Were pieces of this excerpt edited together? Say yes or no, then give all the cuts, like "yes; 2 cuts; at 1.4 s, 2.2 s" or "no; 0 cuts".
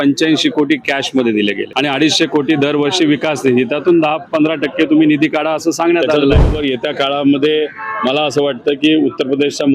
yes; 2 cuts; at 1.7 s, 6.3 s